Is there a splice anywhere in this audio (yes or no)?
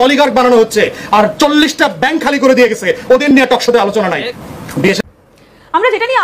yes